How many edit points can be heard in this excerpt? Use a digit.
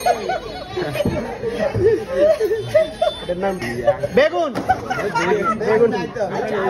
1